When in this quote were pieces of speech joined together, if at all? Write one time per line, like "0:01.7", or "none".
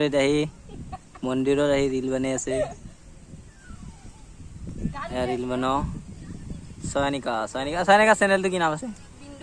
none